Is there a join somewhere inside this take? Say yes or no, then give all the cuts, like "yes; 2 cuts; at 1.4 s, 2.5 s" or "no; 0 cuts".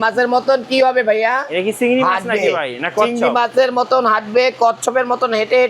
no; 0 cuts